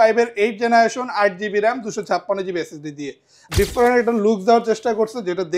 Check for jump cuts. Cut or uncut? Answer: cut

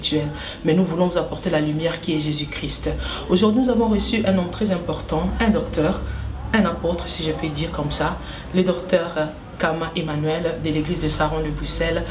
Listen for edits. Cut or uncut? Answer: uncut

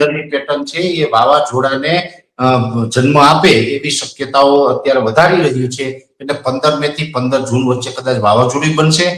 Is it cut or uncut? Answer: uncut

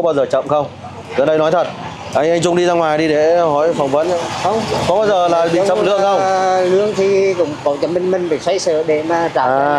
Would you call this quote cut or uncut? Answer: uncut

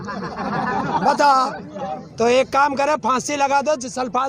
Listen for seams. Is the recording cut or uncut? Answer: cut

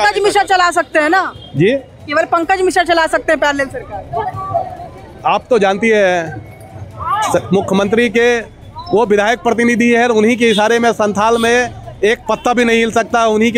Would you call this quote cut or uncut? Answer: uncut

